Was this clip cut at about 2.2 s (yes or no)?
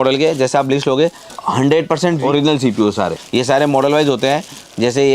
yes